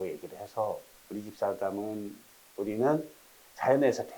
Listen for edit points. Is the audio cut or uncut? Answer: cut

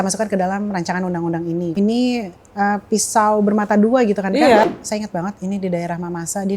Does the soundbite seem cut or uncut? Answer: cut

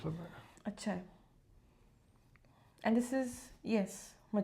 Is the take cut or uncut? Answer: uncut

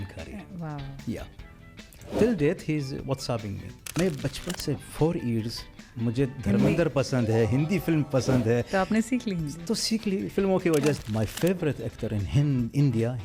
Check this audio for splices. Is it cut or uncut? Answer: cut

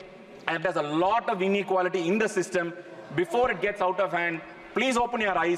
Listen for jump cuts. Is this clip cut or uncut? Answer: uncut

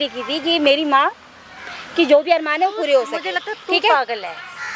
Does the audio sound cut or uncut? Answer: uncut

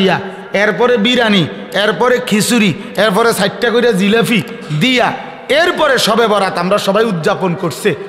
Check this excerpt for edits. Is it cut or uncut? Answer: uncut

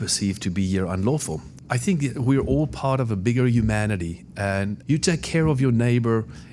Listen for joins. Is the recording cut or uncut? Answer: cut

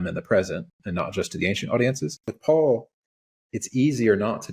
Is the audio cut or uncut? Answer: cut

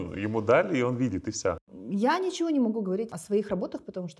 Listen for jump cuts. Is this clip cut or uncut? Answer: cut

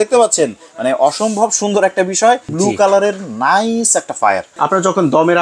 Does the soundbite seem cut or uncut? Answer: cut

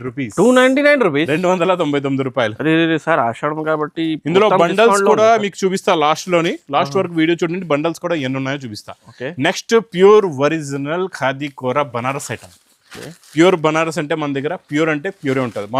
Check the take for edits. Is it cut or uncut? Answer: uncut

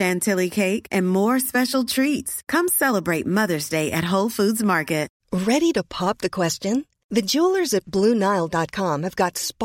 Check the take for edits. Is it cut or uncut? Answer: cut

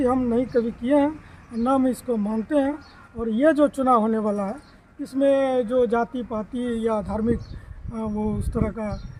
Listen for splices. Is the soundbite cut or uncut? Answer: uncut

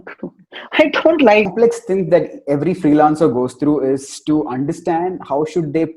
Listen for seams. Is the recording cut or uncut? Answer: cut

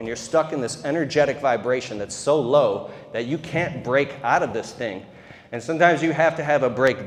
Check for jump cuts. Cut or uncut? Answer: uncut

